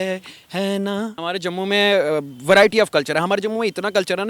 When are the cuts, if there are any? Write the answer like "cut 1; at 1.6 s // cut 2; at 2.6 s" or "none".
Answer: cut 1; at 1.3 s